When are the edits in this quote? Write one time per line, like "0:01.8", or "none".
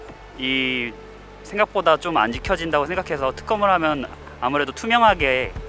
none